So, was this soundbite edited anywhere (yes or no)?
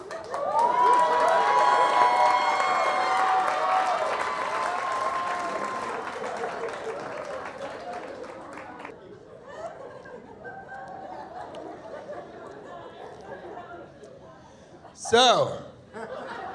yes